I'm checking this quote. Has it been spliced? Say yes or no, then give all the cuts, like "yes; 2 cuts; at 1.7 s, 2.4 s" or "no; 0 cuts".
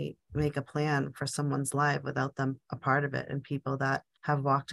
no; 0 cuts